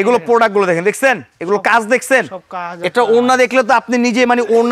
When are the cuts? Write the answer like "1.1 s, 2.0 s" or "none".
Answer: none